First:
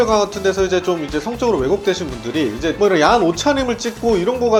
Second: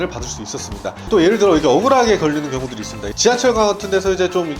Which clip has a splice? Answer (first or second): second